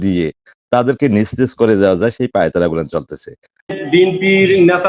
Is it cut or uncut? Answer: cut